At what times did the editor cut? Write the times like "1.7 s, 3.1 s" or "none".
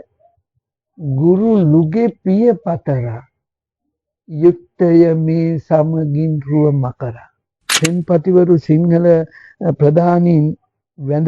7.8 s